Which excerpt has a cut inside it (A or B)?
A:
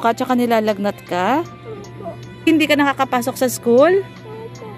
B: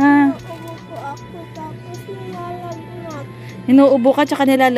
A